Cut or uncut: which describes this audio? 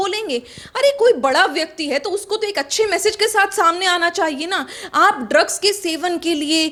uncut